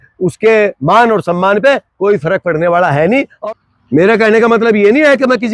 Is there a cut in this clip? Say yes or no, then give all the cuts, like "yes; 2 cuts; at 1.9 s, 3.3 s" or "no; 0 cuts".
yes; 1 cut; at 3.3 s